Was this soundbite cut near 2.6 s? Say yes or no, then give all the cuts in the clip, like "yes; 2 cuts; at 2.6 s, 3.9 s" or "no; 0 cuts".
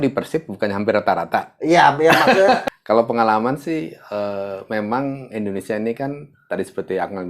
yes; 1 cut; at 2.6 s